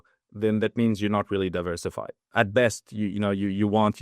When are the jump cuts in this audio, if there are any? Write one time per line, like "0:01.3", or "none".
0:02.3